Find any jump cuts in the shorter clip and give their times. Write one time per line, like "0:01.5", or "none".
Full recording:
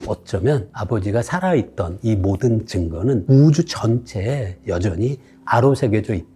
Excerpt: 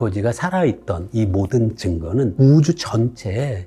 none